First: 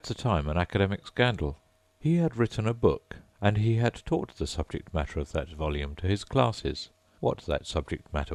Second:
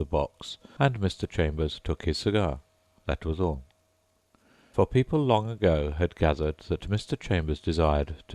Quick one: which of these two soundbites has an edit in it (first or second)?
second